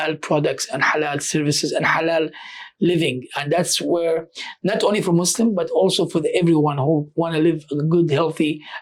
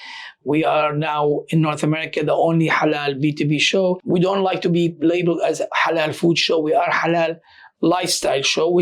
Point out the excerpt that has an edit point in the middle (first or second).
second